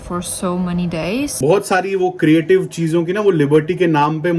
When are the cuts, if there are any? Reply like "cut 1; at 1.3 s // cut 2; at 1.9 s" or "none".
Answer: cut 1; at 1.3 s